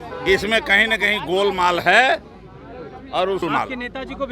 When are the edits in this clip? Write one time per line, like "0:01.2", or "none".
0:03.4